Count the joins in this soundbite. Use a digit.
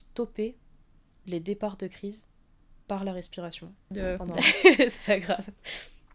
1